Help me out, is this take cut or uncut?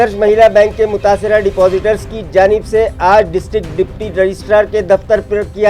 uncut